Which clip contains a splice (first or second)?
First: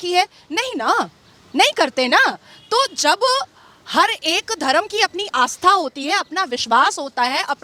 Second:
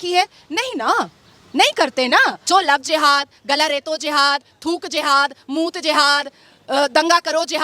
second